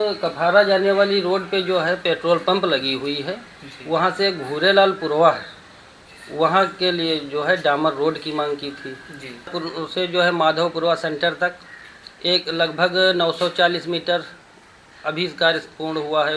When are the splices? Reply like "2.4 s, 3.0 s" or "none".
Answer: 9.5 s